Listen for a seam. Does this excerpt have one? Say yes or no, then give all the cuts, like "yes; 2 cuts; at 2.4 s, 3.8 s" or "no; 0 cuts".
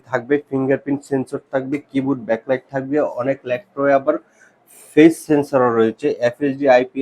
no; 0 cuts